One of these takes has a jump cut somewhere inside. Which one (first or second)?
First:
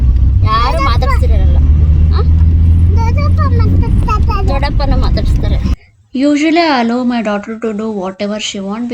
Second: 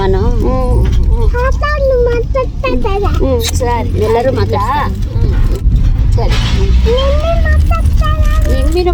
first